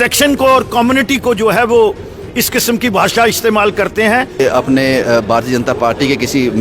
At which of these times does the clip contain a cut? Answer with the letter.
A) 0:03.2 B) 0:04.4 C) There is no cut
B